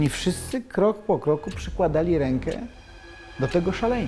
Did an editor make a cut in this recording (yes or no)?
no